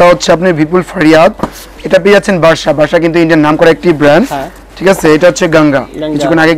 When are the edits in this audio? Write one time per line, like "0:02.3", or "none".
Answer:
none